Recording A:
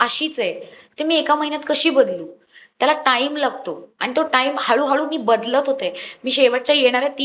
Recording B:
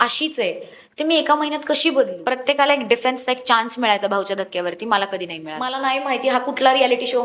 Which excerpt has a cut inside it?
B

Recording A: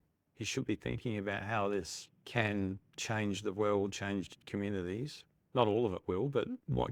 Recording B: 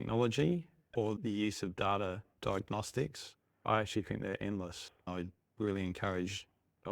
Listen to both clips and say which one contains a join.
B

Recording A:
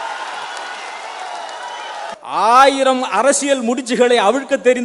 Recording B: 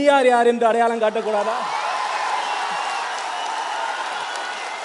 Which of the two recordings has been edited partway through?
A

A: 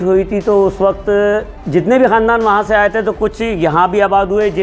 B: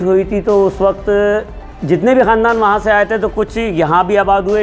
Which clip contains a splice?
A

